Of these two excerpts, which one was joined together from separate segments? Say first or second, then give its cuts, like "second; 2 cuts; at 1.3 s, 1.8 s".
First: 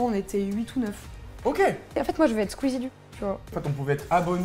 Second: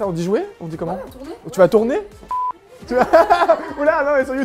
first; 2 cuts; at 2.0 s, 3.6 s